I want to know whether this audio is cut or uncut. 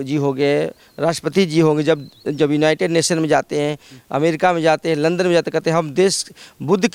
uncut